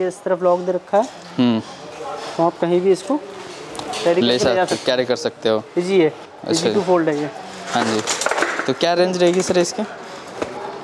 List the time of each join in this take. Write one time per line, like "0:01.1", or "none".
none